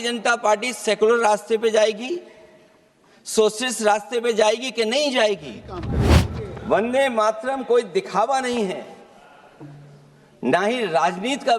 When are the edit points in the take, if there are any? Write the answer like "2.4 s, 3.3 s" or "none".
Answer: 6.0 s